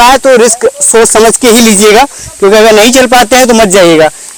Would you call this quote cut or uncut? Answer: uncut